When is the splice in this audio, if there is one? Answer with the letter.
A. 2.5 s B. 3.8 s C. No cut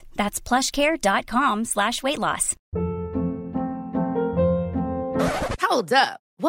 A